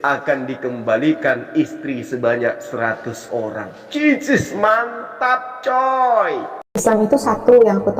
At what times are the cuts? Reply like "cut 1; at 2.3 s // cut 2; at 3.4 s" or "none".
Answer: cut 1; at 6.8 s